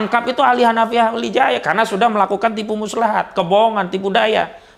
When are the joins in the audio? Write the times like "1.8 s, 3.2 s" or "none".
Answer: none